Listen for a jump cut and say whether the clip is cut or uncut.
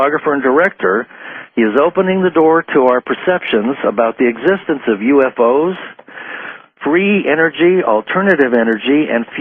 cut